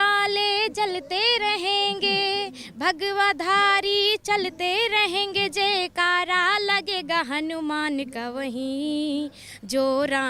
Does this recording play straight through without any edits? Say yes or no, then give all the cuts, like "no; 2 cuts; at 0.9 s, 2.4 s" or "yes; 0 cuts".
yes; 0 cuts